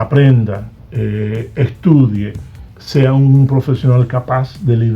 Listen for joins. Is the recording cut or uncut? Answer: uncut